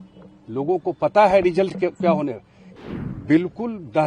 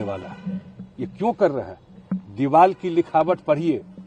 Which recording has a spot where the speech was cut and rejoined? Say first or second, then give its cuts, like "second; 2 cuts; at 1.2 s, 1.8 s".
first; 1 cut; at 2.8 s